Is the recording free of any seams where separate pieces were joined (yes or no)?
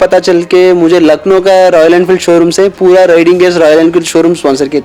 yes